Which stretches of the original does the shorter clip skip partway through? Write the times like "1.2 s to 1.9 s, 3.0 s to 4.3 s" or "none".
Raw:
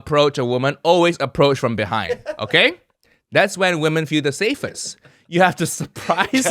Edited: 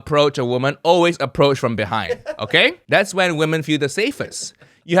2.8 s to 3.2 s